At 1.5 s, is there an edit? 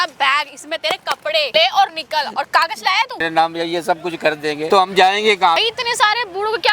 yes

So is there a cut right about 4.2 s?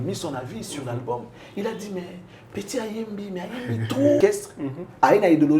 yes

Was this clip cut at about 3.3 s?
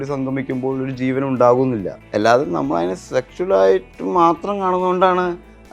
no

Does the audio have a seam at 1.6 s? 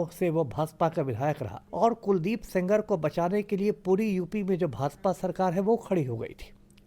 yes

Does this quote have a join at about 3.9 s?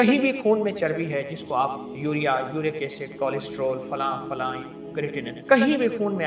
no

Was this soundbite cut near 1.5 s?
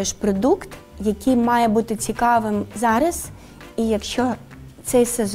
no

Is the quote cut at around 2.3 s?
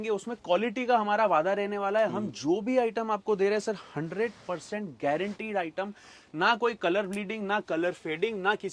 no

